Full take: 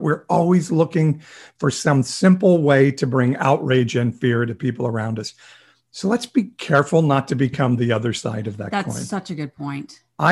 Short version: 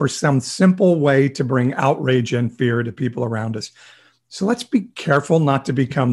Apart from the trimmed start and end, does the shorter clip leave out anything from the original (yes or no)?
no